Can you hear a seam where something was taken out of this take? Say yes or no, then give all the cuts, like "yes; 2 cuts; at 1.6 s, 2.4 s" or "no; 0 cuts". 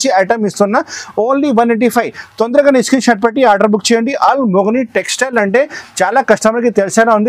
no; 0 cuts